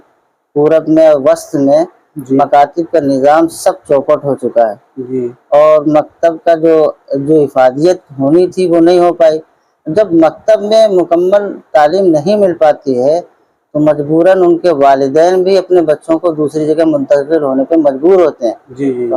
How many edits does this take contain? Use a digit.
0